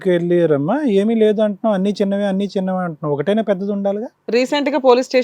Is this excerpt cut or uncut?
cut